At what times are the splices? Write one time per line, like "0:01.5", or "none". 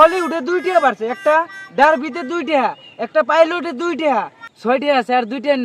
0:04.4